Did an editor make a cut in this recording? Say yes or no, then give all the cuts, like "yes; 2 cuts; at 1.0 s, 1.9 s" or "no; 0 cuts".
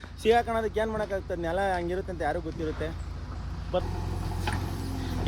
yes; 1 cut; at 3.8 s